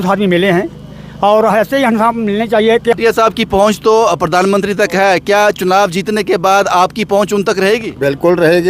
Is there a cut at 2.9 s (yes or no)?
yes